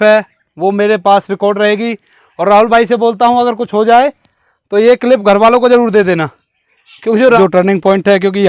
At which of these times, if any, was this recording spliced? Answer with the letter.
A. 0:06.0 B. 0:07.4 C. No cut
B